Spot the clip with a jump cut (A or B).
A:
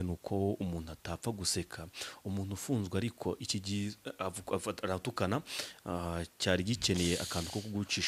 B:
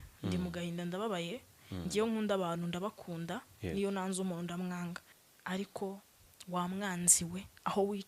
B